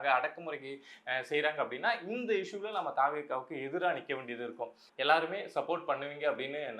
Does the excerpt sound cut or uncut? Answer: cut